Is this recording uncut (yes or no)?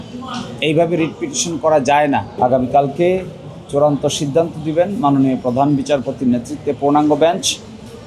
no